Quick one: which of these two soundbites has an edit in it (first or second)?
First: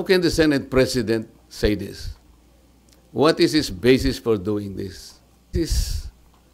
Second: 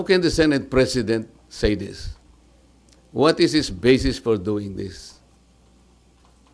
first